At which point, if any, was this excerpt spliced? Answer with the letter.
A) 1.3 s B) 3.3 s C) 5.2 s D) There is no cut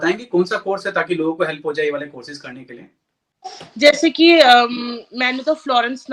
D